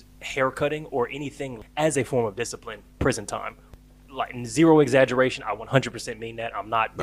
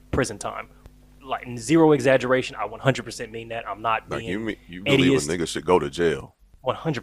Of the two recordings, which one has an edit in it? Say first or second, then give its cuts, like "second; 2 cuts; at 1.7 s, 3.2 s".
first; 1 cut; at 1.5 s